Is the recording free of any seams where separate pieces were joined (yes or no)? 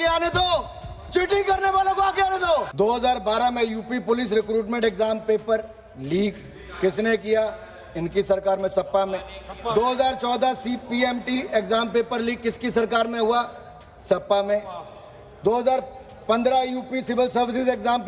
no